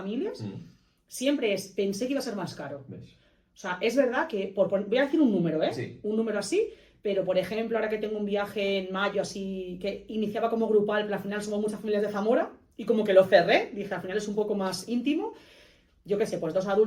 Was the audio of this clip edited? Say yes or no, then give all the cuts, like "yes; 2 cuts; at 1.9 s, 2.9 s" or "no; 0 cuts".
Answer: no; 0 cuts